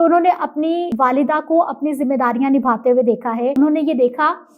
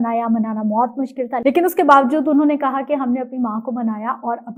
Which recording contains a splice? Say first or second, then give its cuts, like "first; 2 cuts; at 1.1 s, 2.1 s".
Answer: first; 2 cuts; at 0.9 s, 3.5 s